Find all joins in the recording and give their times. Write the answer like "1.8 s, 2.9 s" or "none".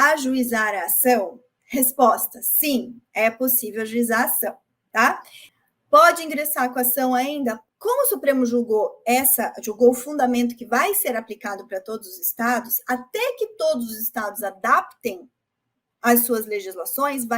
7.6 s